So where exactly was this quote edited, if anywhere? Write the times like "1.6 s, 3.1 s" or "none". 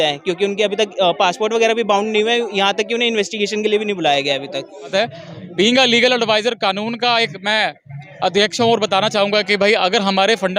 4.9 s